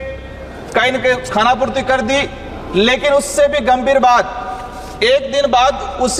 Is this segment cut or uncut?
uncut